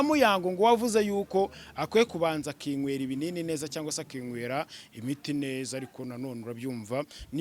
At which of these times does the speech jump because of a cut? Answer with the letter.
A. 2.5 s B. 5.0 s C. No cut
C